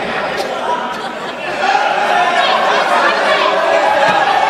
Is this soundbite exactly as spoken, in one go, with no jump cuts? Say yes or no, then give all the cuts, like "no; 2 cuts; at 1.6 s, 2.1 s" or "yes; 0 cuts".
yes; 0 cuts